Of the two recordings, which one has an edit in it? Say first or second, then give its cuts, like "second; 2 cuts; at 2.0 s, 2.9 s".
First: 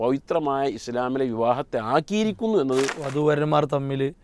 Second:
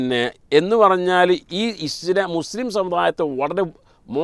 first; 1 cut; at 3.0 s